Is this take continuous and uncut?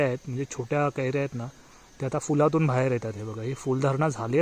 yes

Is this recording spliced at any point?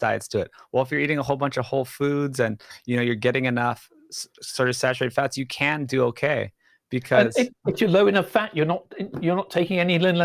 yes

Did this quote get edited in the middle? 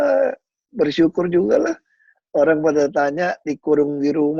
no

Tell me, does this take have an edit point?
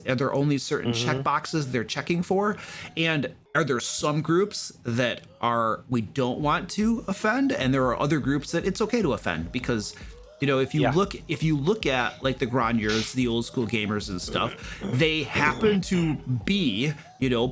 yes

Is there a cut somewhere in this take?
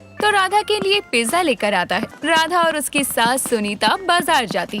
yes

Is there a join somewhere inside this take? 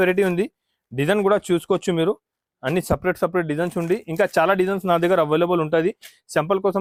no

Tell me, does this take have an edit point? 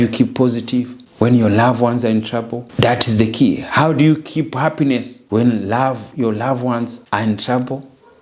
yes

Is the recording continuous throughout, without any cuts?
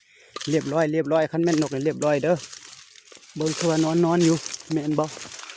yes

